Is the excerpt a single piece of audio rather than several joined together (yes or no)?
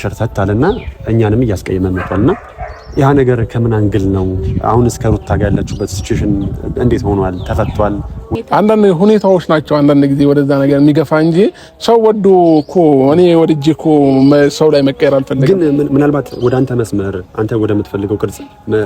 no